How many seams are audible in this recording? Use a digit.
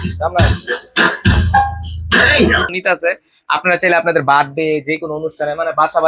1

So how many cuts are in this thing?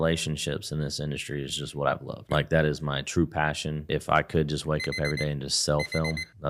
2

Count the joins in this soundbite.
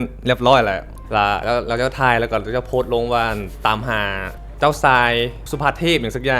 3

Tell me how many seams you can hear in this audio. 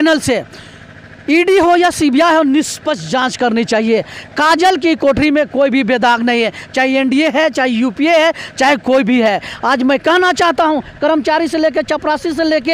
0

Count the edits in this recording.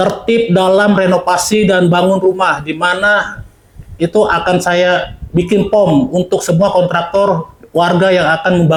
0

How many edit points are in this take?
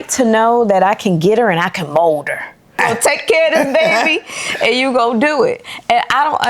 1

